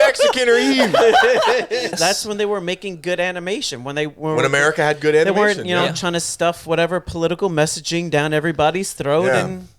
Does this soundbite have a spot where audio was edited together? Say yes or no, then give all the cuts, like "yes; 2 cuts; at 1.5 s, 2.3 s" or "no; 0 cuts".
yes; 1 cut; at 1.9 s